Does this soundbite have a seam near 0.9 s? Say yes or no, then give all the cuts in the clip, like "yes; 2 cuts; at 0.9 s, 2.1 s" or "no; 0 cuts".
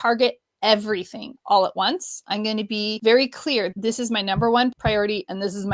no; 3 cuts; at 2.9 s, 3.7 s, 4.8 s